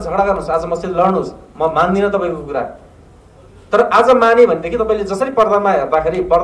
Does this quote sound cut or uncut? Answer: uncut